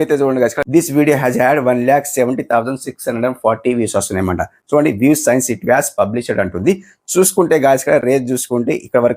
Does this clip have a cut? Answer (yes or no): no